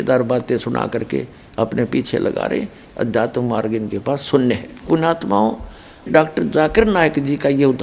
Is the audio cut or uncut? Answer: cut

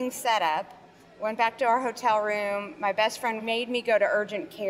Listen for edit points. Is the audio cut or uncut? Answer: cut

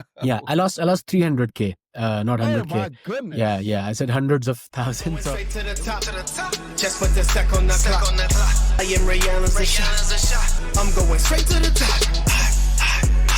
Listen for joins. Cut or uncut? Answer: cut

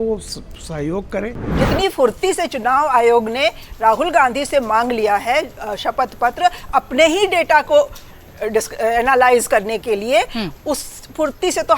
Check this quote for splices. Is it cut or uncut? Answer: cut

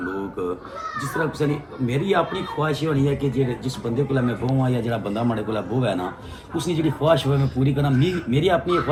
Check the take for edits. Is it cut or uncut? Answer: uncut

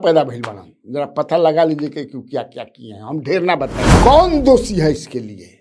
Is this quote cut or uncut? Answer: cut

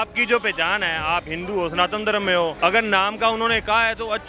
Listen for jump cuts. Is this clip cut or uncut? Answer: cut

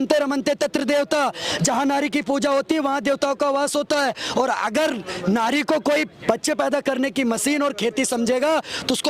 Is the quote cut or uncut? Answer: uncut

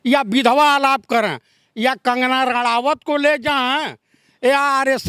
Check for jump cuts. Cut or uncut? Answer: uncut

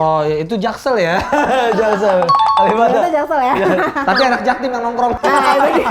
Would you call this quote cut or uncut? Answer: uncut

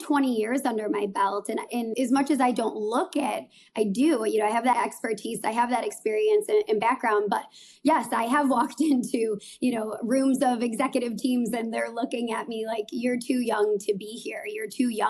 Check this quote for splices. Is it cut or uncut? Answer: cut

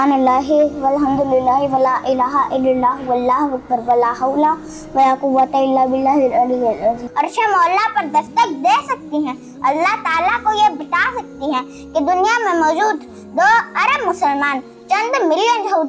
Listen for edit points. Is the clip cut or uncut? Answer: cut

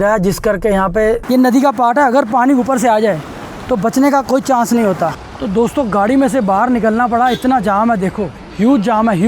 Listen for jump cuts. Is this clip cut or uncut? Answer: cut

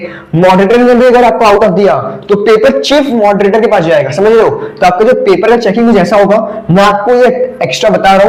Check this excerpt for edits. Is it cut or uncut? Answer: uncut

